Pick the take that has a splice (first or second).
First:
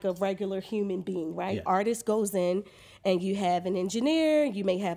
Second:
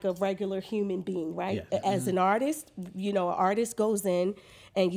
first